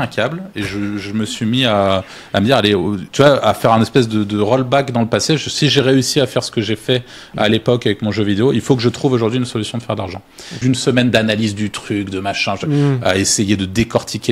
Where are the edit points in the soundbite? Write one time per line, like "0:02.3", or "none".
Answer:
0:10.6